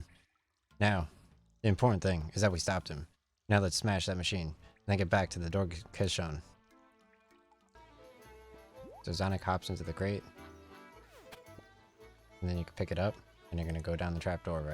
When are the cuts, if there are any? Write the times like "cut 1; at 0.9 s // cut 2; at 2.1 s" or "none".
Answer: cut 1; at 7.8 s